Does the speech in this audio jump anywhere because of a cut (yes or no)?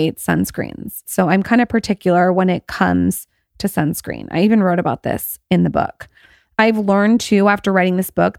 yes